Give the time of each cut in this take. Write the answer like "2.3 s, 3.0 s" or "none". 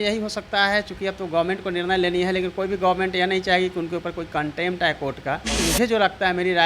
5.6 s